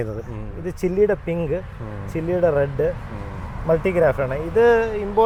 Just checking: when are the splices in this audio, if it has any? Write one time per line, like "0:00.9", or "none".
none